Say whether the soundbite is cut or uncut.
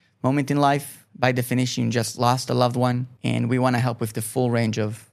cut